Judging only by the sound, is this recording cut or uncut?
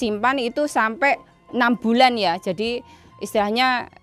uncut